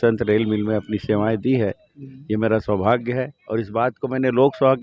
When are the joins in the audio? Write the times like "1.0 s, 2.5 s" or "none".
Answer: none